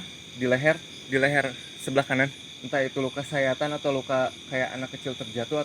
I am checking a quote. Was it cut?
yes; 2 cuts; at 0.9 s, 2.5 s

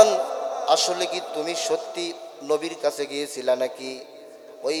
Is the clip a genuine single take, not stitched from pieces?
yes; 0 cuts

